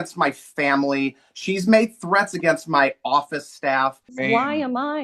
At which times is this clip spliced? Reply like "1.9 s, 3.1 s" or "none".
4.1 s